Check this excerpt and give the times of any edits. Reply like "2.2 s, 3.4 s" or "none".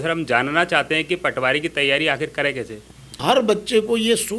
3.2 s